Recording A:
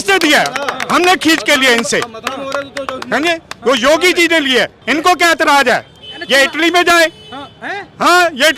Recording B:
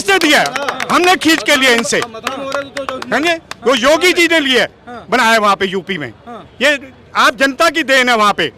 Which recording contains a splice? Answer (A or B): A